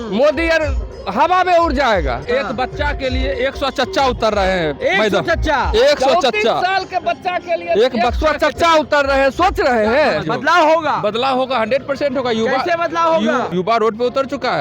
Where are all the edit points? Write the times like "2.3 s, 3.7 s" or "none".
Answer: 2.2 s, 10.2 s, 13.5 s